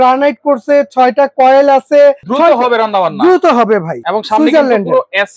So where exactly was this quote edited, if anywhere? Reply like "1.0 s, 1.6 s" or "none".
2.3 s, 4.0 s